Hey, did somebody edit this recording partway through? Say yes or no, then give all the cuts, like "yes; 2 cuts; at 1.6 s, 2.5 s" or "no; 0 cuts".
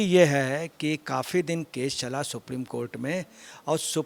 no; 0 cuts